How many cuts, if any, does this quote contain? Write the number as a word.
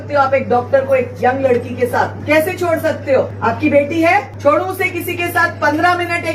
three